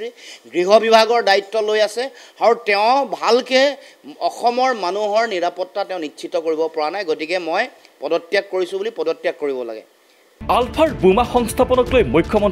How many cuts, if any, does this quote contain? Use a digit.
0